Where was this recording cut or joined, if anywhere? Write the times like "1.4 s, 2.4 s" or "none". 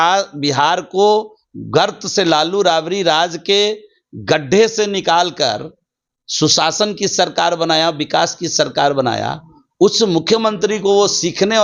none